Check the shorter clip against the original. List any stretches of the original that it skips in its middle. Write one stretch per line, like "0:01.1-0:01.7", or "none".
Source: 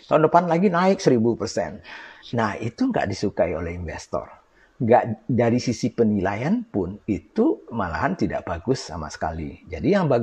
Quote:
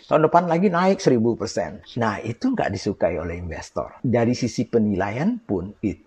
0:01.8-0:02.2
0:04.3-0:05.2